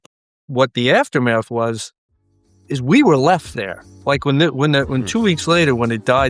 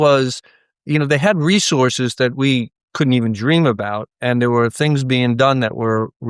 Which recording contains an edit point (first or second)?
second